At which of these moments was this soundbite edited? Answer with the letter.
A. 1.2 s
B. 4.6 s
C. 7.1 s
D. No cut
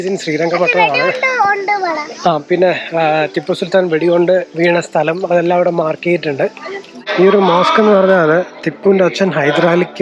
C